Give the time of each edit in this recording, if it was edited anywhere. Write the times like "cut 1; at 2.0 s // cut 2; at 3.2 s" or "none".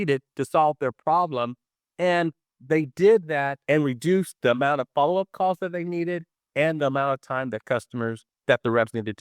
cut 1; at 3.6 s